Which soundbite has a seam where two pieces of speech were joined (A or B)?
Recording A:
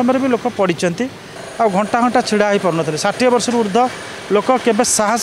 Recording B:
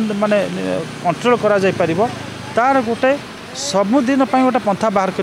A